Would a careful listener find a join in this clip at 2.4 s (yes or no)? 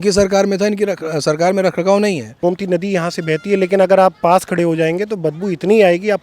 yes